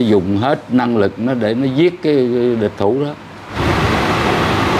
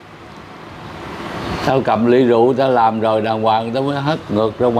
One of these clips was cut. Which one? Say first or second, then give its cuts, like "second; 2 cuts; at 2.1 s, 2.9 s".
first; 1 cut; at 3.5 s